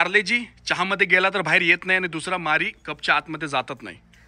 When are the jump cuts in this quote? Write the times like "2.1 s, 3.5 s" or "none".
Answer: none